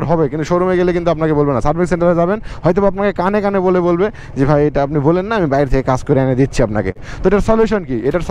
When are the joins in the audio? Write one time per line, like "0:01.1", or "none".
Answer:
0:07.1